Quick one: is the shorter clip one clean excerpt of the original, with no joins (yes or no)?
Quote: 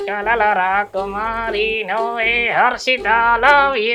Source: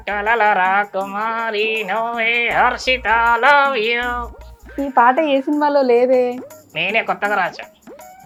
yes